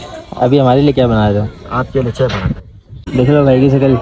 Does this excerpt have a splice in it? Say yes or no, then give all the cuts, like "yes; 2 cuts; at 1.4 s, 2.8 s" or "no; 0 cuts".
yes; 1 cut; at 3.1 s